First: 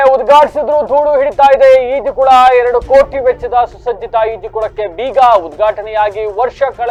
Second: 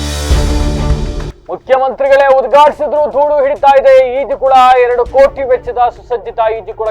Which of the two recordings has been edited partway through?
second; 1 cut; at 1.3 s

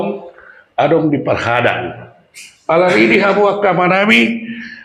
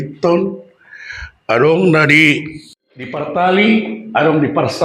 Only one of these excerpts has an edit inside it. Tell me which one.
second; 1 cut; at 3.2 s

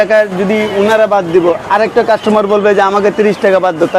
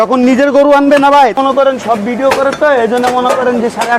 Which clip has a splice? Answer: second; 1 cut; at 1.4 s

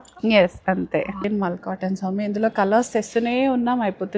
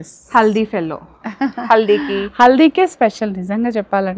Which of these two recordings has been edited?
first; 1 cut; at 1.2 s

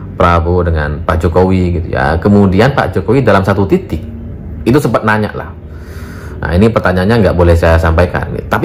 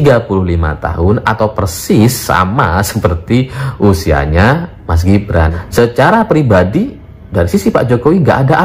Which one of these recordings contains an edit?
second; 1 cut; at 5.5 s

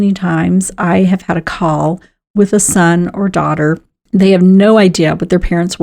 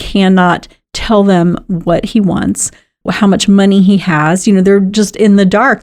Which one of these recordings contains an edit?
first; 1 cut; at 3.9 s

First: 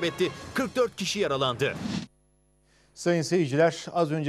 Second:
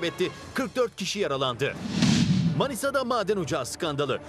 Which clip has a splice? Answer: second; 1 cut; at 2.1 s

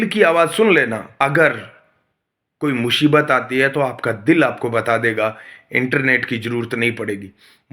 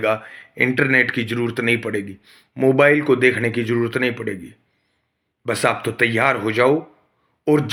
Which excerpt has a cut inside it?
first; 1 cut; at 1.0 s

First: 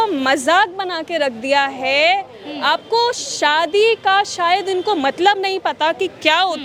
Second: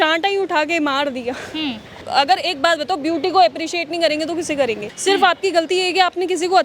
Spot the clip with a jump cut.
second; 2 cuts; at 2.0 s, 4.9 s

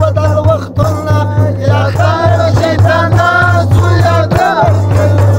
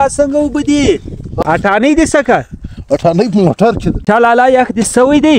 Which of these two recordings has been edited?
second; 2 cuts; at 1.3 s, 4.0 s

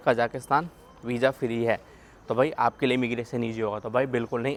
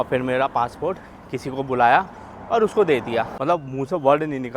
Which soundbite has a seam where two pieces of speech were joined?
second; 1 cut; at 3.3 s

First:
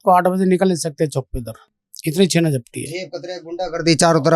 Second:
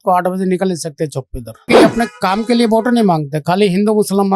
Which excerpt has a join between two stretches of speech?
second; 1 cut; at 1.7 s

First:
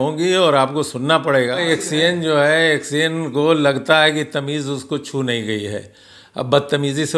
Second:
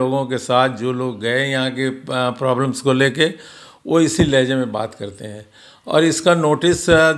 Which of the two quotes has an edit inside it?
first; 1 cut; at 1.7 s

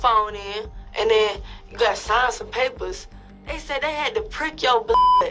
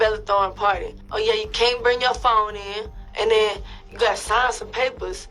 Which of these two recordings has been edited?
second; 1 cut; at 1.1 s

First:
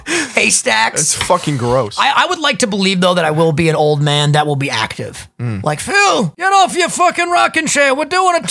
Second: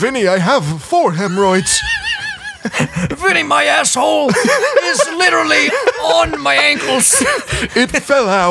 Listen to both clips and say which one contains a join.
first; 1 cut; at 6.3 s

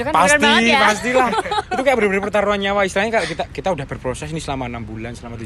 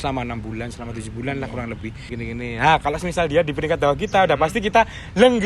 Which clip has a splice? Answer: second; 1 cut; at 2.1 s

